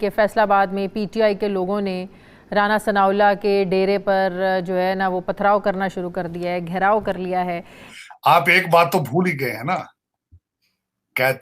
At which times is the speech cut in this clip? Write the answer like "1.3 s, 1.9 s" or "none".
7.8 s

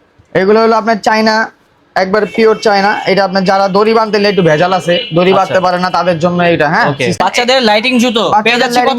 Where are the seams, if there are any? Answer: 7.2 s

